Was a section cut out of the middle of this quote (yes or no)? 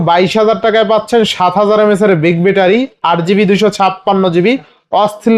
no